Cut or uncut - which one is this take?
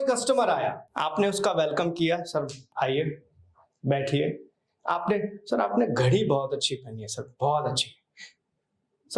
cut